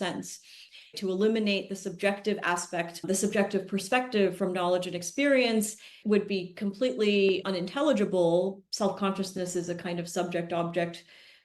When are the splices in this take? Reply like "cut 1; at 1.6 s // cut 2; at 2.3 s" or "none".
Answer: cut 1; at 0.9 s // cut 2; at 6.0 s // cut 3; at 8.6 s